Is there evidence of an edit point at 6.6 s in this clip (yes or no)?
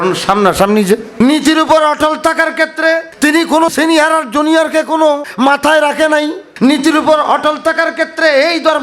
no